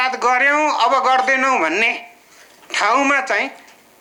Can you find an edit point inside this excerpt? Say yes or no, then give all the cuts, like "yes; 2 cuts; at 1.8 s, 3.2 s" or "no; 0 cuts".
no; 0 cuts